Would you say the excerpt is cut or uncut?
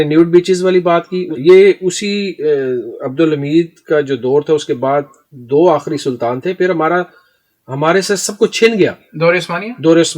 cut